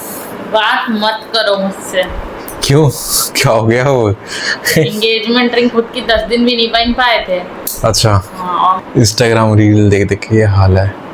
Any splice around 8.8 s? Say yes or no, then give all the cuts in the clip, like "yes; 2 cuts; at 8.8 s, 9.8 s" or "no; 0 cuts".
yes; 1 cut; at 8.8 s